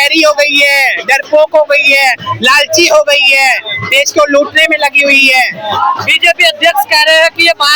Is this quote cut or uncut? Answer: uncut